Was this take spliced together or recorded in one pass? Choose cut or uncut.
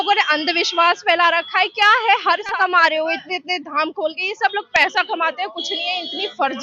cut